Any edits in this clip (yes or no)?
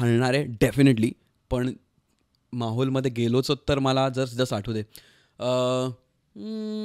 no